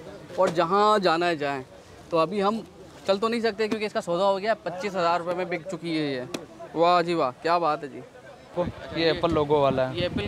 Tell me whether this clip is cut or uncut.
cut